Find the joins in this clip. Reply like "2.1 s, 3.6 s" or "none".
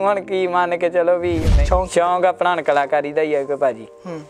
1.5 s

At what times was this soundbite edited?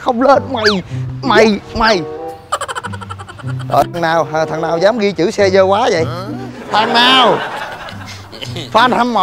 none

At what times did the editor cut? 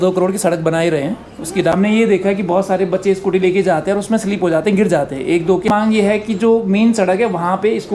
1.7 s, 5.7 s

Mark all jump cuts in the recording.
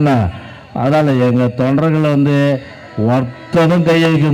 none

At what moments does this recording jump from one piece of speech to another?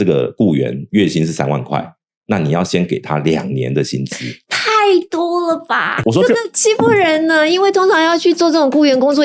6.0 s

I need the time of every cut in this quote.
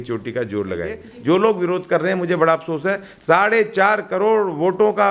1.1 s

